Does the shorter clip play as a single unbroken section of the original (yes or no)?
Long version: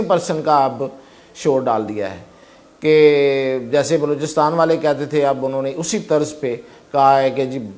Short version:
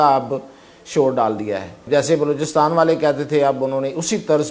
no